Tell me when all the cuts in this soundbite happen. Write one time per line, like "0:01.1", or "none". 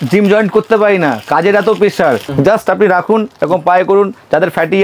0:02.2